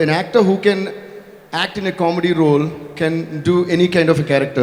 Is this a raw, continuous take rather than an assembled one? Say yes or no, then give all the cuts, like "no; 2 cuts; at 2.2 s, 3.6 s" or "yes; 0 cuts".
yes; 0 cuts